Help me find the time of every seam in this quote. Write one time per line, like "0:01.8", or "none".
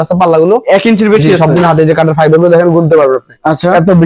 none